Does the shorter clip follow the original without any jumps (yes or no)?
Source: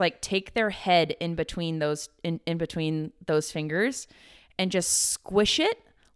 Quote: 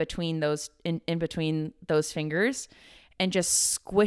yes